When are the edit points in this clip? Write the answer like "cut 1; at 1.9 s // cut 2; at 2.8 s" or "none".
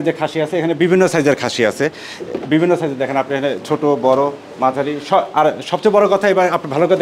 none